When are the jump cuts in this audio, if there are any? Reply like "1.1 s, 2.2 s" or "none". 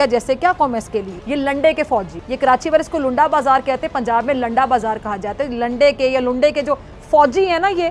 none